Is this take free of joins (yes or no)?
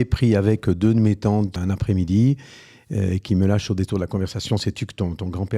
no